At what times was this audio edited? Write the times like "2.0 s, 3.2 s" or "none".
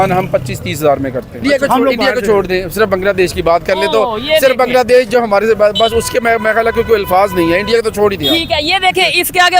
1.4 s